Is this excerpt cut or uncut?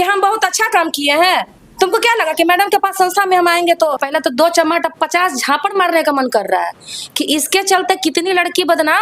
cut